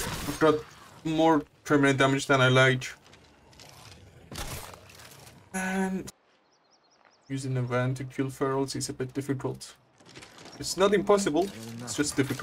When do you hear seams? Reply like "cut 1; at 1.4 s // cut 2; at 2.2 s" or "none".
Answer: cut 1; at 6.1 s